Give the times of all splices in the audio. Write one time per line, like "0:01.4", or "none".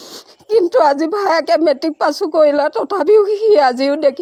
none